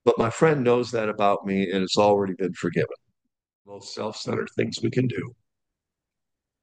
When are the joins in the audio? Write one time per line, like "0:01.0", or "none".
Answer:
0:03.9